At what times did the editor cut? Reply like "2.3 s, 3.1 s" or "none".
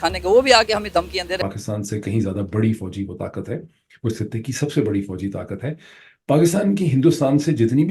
1.4 s